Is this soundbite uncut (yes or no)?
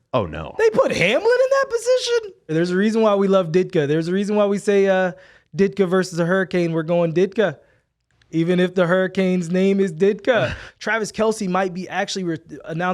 no